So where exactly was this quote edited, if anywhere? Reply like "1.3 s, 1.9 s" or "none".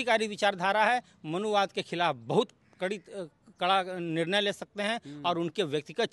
none